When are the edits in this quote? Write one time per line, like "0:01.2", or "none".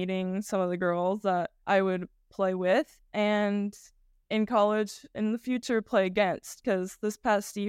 0:01.6
0:05.1

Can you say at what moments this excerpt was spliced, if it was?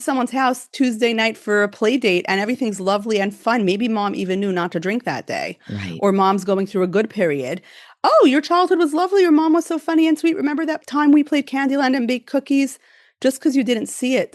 0:01.4
0:03.4
0:10.8

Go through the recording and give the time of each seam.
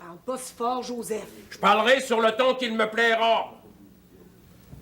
none

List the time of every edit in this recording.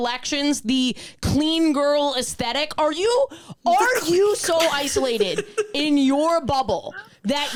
none

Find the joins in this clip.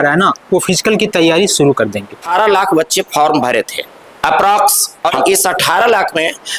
0:02.3
0:05.1

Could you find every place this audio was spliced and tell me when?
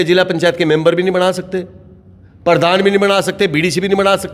none

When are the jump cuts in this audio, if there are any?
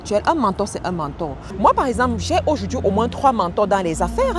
0:01.4

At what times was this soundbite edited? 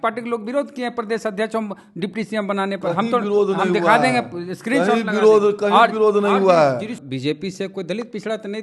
0:07.0

